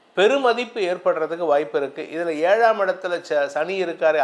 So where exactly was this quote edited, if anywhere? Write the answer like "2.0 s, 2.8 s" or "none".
none